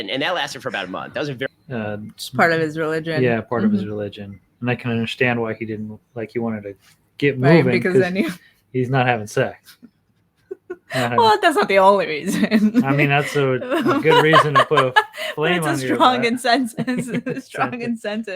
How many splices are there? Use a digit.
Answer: 1